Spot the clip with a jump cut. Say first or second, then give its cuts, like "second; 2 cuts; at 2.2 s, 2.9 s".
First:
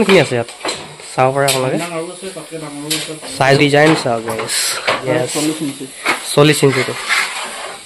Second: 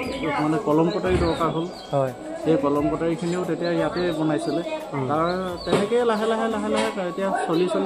first; 2 cuts; at 3.6 s, 5.0 s